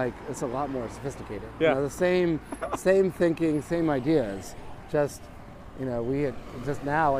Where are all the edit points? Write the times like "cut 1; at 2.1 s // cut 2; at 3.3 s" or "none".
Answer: none